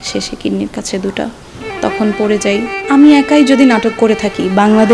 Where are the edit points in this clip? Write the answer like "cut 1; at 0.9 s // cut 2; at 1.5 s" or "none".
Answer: cut 1; at 2.7 s